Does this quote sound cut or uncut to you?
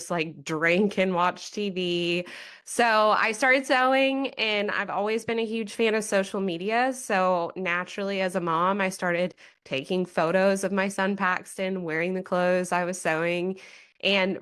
uncut